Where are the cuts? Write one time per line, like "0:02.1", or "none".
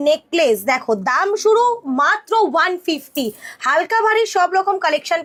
none